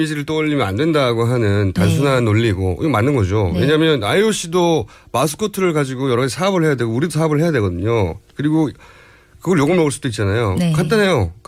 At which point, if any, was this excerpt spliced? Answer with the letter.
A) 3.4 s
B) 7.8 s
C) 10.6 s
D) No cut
D